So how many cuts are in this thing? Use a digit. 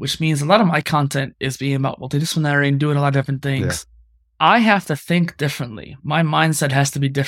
0